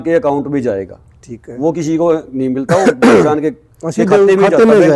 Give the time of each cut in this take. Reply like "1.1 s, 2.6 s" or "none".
none